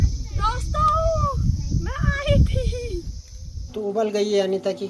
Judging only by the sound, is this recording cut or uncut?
cut